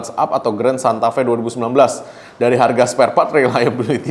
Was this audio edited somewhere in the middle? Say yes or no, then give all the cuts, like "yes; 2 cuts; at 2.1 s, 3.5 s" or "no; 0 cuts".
no; 0 cuts